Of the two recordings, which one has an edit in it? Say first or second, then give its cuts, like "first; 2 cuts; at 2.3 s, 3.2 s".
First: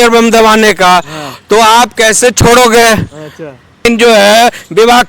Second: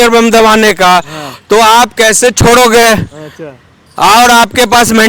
first; 1 cut; at 3.8 s